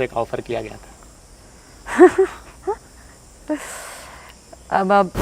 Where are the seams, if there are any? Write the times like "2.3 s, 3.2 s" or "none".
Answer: none